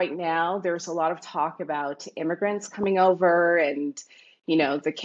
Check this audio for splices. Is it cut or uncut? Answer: uncut